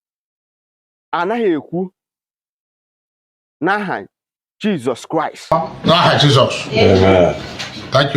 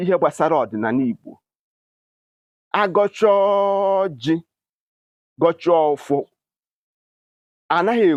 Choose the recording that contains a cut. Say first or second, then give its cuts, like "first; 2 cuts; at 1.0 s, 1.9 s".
first; 1 cut; at 5.4 s